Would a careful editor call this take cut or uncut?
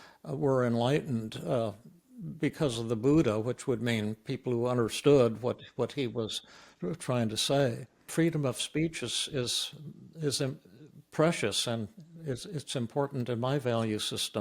cut